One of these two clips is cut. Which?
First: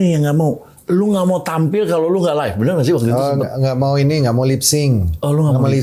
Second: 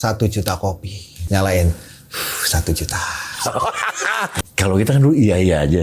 second; 2 cuts; at 1.1 s, 4.3 s

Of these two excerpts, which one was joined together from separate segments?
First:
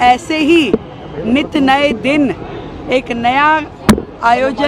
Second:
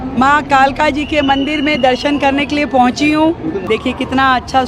second; 1 cut; at 3.6 s

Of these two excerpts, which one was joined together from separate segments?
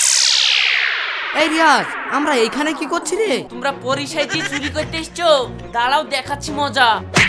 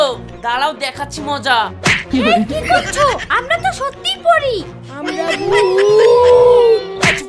first; 1 cut; at 3.5 s

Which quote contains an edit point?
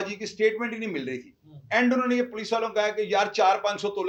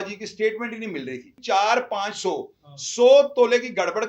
second; 1 cut; at 1.4 s

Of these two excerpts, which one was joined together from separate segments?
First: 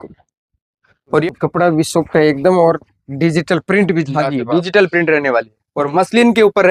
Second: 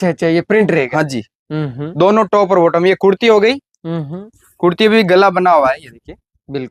first; 1 cut; at 1.2 s

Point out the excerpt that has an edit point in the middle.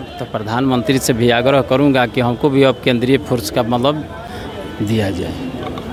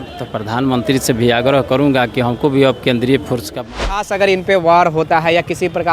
second; 1 cut; at 3.8 s

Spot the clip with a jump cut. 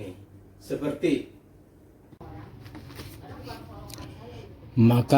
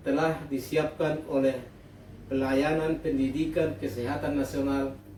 first; 1 cut; at 2.1 s

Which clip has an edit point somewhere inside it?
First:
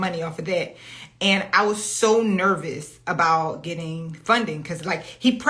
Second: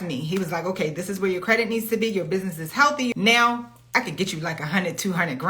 second; 1 cut; at 3.1 s

